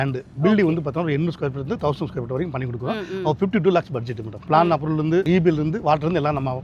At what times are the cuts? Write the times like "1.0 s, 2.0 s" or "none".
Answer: 4.4 s, 5.2 s